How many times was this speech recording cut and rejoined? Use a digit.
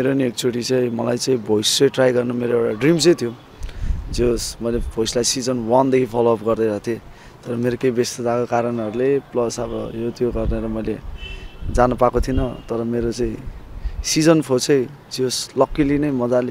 0